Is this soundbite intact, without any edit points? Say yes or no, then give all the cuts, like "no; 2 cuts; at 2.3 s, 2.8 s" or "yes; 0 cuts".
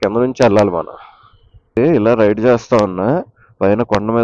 no; 1 cut; at 1.8 s